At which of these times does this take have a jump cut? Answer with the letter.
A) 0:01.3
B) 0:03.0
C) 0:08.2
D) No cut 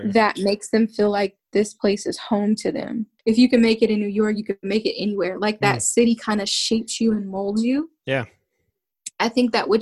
B